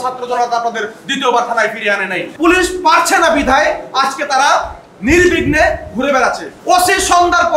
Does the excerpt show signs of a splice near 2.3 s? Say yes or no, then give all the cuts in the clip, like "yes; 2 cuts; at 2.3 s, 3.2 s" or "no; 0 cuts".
yes; 2 cuts; at 2.3 s, 6.5 s